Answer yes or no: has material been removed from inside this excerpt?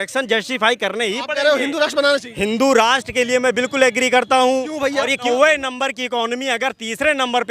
yes